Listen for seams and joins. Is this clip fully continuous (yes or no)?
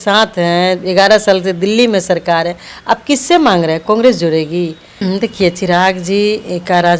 no